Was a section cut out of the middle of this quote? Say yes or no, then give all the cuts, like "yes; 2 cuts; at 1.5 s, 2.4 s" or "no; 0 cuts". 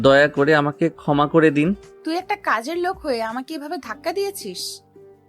yes; 1 cut; at 2.0 s